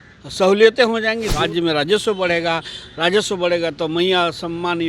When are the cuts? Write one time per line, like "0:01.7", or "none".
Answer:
0:01.3